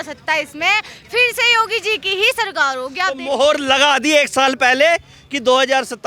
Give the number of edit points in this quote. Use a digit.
0